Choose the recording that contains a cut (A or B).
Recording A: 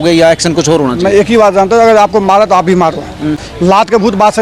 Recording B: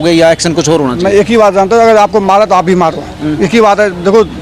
A